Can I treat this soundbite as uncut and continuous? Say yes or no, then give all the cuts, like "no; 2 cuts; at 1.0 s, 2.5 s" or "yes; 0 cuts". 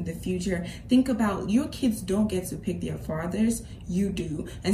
yes; 0 cuts